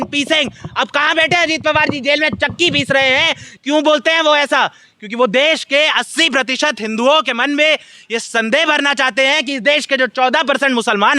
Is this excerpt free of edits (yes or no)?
no